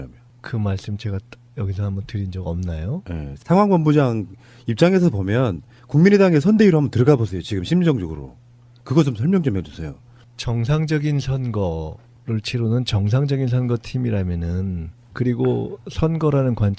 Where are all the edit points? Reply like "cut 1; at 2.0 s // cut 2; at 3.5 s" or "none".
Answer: none